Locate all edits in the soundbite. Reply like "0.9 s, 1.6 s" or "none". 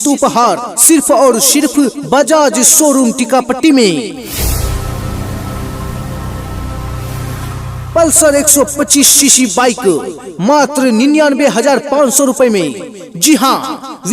4.2 s, 5.9 s, 7.7 s